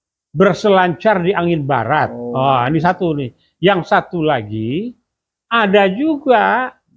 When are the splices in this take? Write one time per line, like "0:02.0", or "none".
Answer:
none